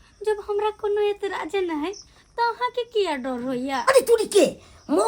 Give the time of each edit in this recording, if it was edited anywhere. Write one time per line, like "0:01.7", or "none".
0:03.9